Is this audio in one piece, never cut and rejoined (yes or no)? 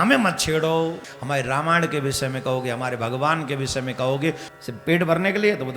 no